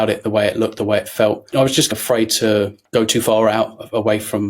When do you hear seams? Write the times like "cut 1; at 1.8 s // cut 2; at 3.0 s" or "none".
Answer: cut 1; at 1.9 s // cut 2; at 2.8 s